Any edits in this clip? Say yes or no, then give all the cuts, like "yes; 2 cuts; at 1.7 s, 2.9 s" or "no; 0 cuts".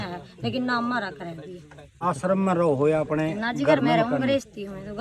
yes; 1 cut; at 2.0 s